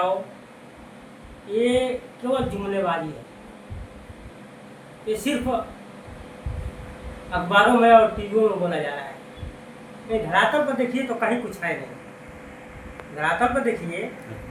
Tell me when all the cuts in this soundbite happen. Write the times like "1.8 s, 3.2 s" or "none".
none